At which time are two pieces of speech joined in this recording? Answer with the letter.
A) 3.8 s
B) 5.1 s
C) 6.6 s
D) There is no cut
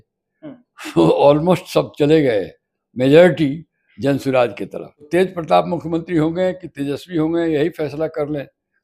B